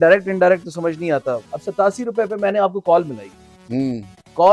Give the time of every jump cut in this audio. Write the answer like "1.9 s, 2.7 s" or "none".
1.4 s